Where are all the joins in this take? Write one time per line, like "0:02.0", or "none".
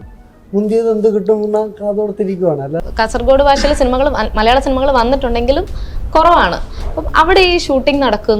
0:02.8